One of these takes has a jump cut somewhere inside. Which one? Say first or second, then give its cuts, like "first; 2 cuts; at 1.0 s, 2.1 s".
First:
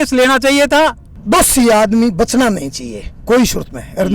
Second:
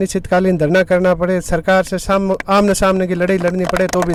first; 1 cut; at 1.1 s